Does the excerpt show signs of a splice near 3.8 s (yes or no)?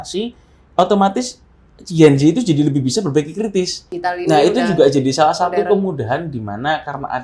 yes